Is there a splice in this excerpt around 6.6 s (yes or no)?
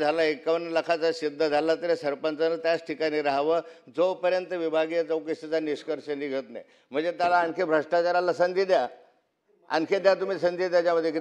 no